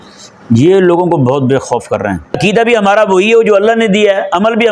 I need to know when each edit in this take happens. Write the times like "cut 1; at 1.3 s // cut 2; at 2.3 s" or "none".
cut 1; at 2.4 s